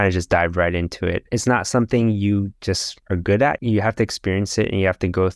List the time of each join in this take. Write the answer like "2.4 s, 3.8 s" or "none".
1.2 s, 3.6 s